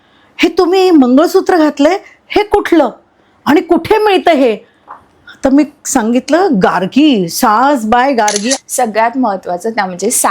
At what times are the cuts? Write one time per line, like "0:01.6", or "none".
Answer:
0:08.5